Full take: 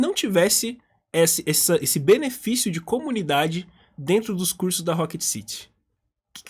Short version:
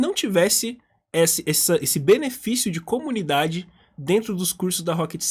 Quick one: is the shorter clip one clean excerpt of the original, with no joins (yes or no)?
yes